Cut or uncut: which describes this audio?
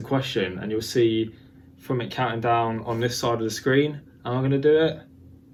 uncut